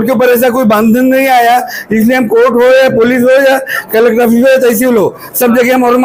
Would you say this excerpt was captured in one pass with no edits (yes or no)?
yes